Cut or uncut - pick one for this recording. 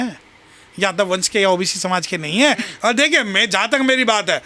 uncut